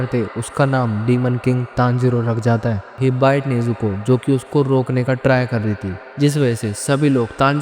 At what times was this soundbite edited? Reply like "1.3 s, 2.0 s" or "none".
2.9 s, 6.0 s

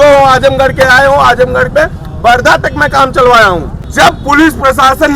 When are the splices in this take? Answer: 3.8 s

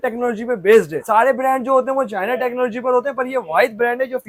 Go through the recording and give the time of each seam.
none

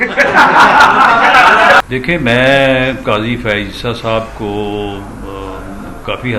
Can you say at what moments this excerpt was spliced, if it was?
1.8 s

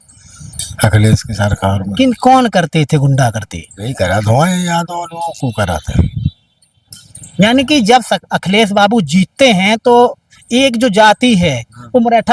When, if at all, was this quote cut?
none

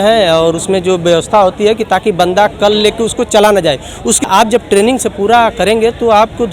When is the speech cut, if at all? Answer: 4.3 s

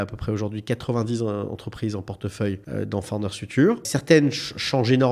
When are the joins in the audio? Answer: 2.6 s, 3.9 s

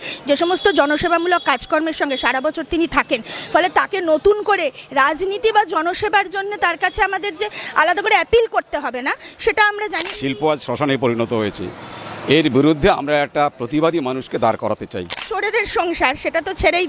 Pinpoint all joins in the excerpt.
10.1 s, 15.2 s

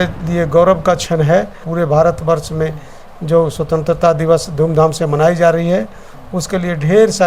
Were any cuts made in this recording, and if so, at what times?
1.7 s

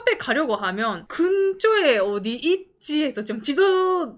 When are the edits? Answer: 1.0 s

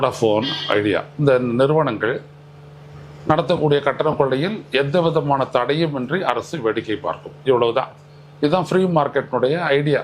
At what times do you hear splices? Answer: none

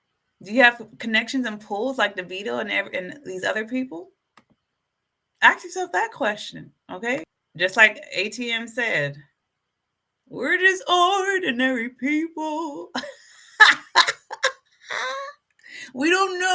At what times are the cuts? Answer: 7.4 s

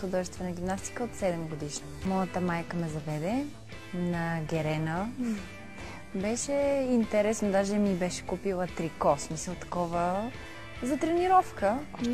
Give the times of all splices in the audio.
1.9 s

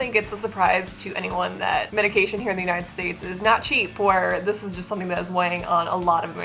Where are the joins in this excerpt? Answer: 1.9 s

